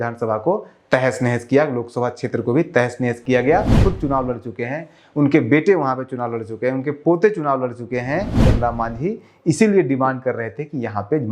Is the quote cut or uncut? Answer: cut